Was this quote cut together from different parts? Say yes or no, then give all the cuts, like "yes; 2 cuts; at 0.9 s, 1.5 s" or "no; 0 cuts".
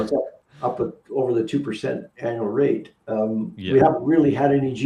yes; 1 cut; at 2.1 s